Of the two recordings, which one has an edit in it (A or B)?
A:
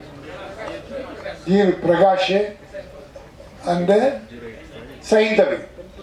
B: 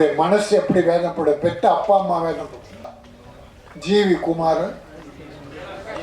B